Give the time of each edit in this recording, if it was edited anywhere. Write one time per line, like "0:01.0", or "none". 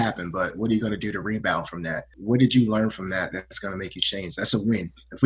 0:02.2